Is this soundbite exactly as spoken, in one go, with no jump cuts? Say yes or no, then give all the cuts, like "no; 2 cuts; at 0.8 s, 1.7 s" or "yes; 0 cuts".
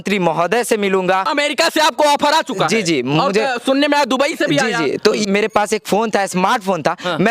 no; 2 cuts; at 1.3 s, 5.2 s